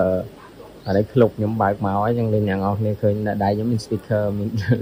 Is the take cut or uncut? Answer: uncut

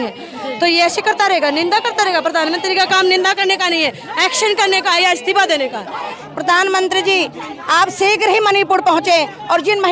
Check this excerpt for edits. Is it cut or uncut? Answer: cut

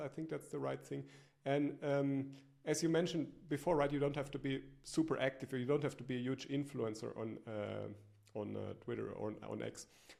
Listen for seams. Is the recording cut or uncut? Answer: uncut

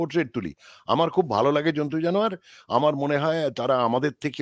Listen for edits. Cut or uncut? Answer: uncut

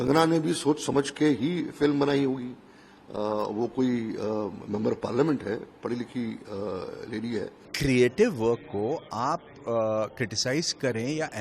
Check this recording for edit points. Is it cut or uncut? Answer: cut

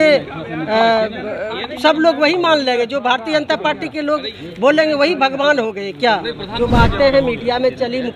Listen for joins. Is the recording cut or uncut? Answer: cut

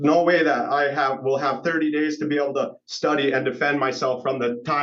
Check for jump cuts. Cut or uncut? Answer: uncut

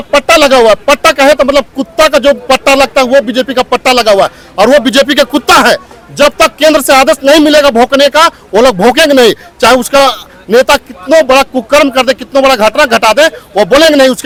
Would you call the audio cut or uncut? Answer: uncut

